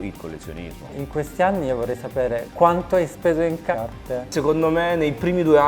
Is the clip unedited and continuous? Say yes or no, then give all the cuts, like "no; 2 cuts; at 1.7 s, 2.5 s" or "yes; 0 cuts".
no; 2 cuts; at 1.0 s, 3.7 s